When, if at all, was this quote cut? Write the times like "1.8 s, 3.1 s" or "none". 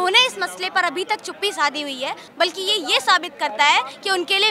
2.2 s